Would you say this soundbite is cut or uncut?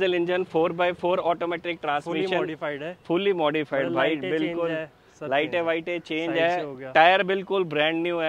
uncut